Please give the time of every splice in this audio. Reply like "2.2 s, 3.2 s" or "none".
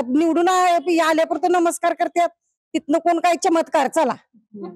none